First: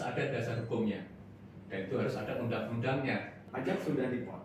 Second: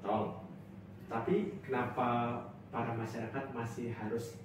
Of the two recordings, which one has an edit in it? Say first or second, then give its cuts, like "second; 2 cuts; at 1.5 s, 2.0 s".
first; 1 cut; at 3.4 s